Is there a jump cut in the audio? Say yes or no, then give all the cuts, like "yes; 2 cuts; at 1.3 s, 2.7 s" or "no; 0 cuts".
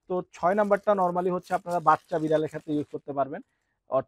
no; 0 cuts